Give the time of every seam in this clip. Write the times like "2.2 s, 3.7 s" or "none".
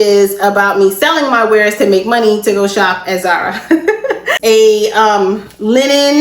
4.3 s